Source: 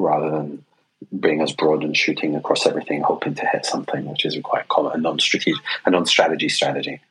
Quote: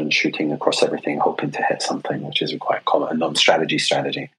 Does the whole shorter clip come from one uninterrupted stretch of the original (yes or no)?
no